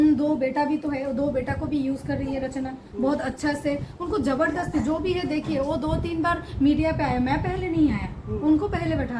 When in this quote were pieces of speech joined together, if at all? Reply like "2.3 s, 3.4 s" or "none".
none